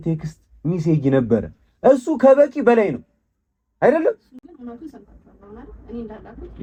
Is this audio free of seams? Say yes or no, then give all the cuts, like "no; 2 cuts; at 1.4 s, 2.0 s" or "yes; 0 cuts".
yes; 0 cuts